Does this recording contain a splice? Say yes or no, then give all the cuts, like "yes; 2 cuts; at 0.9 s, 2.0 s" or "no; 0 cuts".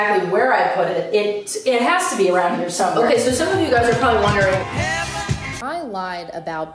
yes; 1 cut; at 5.4 s